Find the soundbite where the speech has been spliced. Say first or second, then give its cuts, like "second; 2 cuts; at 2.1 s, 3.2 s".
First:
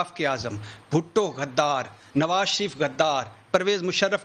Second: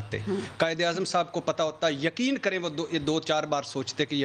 first; 1 cut; at 3.1 s